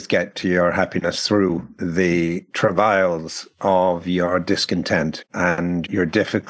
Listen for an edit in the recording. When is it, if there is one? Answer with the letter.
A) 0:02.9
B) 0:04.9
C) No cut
C